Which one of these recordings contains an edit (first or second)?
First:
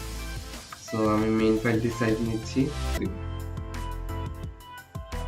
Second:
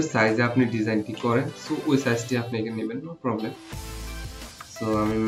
first